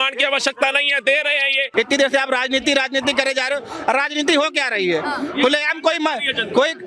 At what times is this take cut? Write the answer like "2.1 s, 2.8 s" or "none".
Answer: 1.7 s

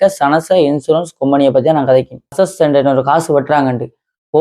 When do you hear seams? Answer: 2.3 s

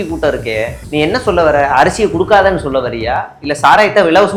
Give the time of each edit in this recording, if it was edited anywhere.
none

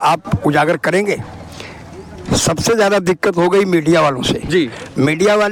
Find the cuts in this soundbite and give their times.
none

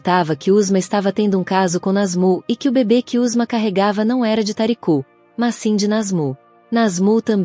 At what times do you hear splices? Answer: 6.5 s

